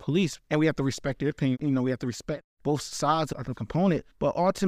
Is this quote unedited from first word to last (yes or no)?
no